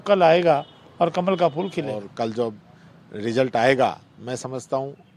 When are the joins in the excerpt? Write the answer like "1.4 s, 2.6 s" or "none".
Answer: 2.0 s

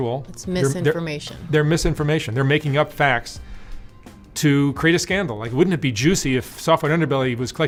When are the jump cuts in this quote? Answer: none

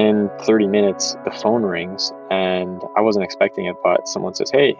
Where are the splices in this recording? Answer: none

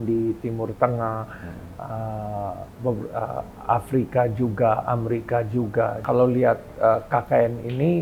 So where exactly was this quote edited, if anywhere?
6.0 s

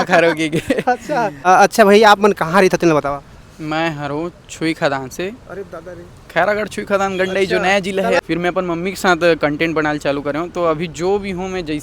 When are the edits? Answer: 1.3 s, 8.2 s

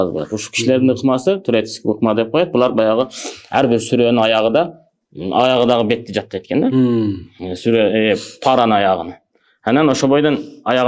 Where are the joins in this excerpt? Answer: none

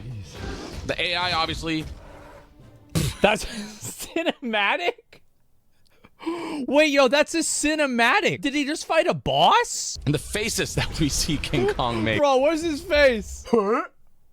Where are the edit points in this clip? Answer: 8.4 s, 9.8 s, 13.3 s

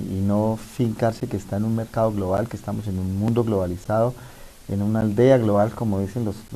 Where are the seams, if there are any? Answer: 1.3 s

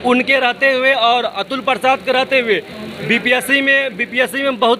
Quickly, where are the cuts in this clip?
none

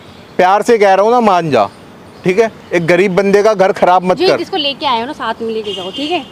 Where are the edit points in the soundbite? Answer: none

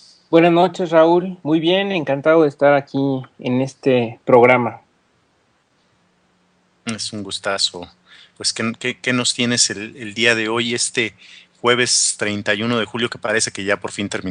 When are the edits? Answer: 2.6 s

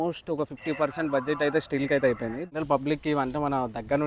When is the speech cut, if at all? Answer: 2.5 s

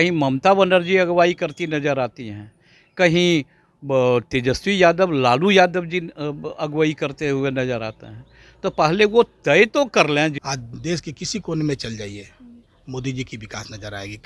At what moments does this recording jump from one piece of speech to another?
10.4 s

